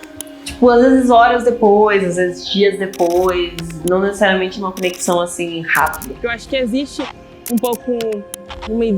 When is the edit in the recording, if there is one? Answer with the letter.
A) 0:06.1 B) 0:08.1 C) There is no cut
A